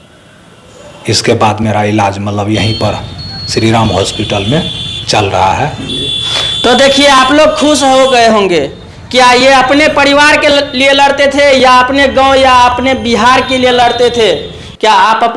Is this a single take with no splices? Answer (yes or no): yes